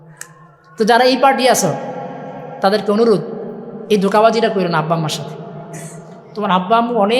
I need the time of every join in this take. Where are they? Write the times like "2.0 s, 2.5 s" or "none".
none